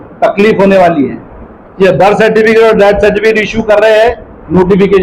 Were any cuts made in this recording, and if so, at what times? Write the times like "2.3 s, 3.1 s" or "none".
none